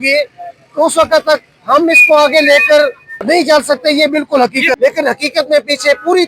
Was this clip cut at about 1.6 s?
no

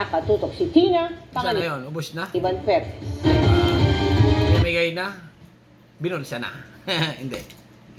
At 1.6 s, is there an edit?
no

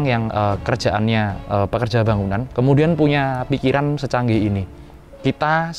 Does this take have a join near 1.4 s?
yes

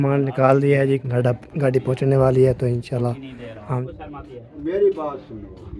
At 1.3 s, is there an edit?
no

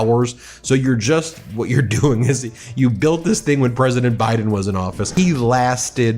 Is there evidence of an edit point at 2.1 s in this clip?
no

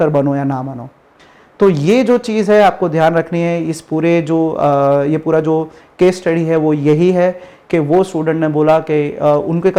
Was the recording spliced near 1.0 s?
no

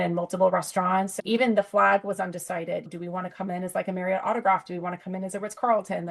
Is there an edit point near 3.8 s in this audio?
no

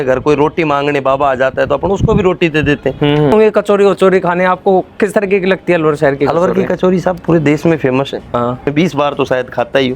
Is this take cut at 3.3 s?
yes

